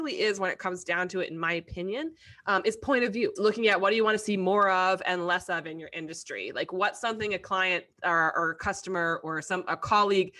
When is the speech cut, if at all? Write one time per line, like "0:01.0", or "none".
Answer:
0:03.4